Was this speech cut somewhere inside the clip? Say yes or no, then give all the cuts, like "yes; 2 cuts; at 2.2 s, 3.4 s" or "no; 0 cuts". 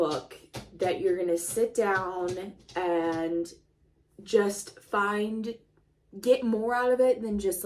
no; 0 cuts